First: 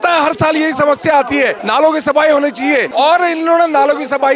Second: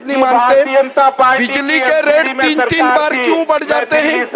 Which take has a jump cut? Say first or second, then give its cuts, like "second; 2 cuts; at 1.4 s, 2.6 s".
first; 2 cuts; at 1.6 s, 2.9 s